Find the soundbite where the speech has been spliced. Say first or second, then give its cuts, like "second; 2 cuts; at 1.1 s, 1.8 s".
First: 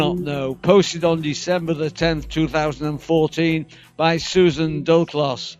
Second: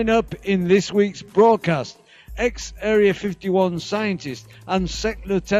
second; 1 cut; at 1.6 s